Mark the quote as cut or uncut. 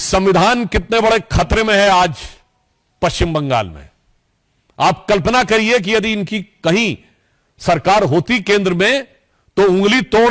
uncut